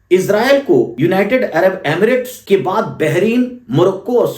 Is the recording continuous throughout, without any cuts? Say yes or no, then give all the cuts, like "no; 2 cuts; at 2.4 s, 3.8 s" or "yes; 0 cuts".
no; 2 cuts; at 0.9 s, 2.3 s